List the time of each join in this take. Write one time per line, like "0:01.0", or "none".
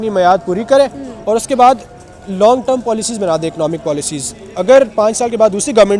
none